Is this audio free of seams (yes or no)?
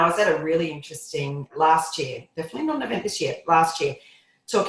no